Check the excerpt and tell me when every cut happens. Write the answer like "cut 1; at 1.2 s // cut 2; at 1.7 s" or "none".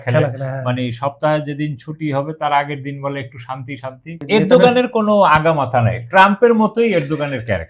cut 1; at 4.2 s